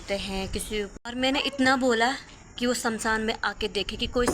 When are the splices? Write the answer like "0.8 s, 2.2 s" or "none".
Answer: 1.0 s